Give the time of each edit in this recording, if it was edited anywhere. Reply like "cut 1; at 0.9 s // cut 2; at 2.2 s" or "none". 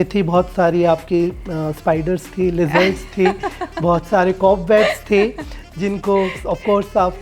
none